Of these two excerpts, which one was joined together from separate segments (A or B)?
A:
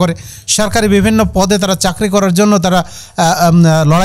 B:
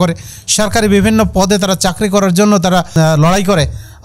B